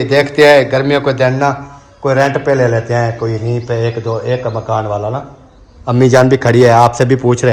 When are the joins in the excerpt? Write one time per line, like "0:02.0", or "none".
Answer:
none